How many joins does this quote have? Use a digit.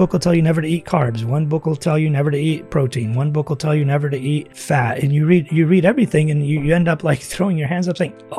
1